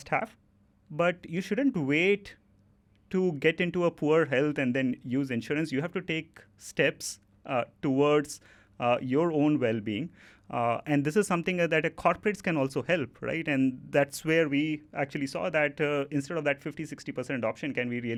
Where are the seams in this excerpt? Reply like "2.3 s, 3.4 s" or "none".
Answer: none